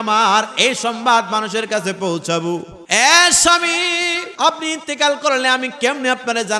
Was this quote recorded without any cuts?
no; 2 cuts; at 2.8 s, 4.3 s

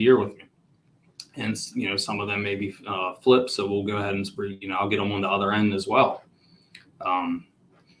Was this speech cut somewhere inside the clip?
no; 0 cuts

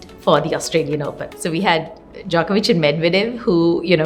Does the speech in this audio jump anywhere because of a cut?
no; 0 cuts

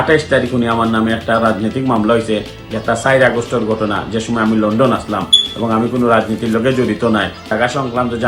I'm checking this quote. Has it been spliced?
no; 0 cuts

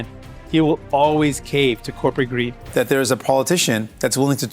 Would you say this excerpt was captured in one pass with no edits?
no; 1 cut; at 2.6 s

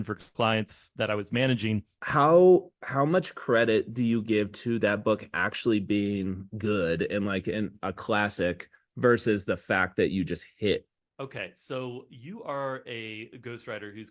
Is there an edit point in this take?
yes; 2 cuts; at 1.9 s, 10.9 s

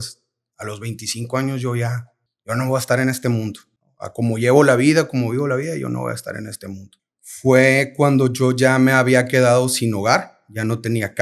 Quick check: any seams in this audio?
yes; 1 cut; at 6.9 s

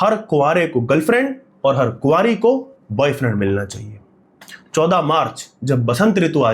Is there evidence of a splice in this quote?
no; 0 cuts

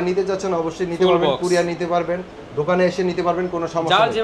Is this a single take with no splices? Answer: yes; 0 cuts

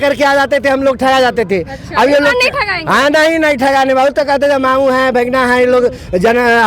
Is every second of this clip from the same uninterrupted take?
yes; 0 cuts

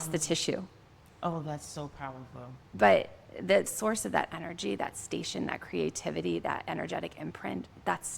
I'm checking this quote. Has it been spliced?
yes; 1 cut; at 3.7 s

